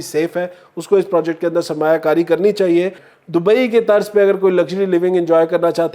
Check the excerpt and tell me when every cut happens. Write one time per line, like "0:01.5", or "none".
0:03.1